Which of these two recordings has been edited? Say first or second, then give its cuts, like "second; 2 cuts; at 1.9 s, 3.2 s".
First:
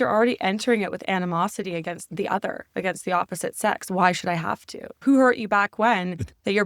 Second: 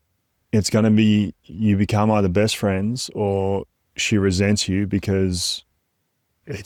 first; 2 cuts; at 2.0 s, 5.0 s